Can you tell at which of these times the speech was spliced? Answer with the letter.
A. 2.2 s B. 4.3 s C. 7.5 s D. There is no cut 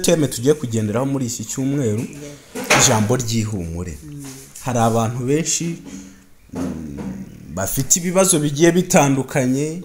D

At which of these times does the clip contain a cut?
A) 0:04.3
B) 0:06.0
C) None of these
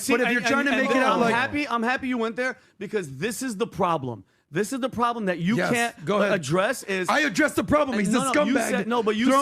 B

